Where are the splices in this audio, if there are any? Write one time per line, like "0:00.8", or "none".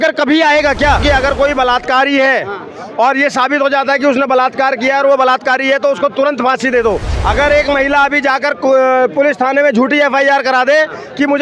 0:01.0
0:07.1